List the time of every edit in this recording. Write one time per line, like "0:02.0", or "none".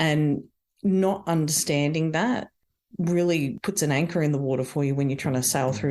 0:03.6